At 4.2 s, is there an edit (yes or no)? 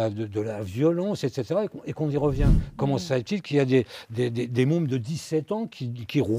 no